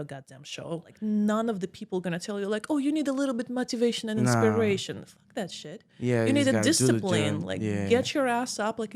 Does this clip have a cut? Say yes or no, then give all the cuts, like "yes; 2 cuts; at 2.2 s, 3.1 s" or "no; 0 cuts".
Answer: yes; 1 cut; at 0.9 s